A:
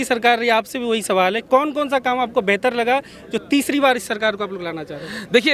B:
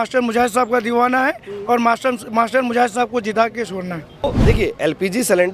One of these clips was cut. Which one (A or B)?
B